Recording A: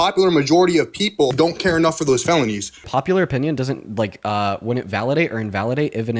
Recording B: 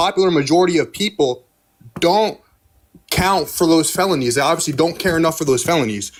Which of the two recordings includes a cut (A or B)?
A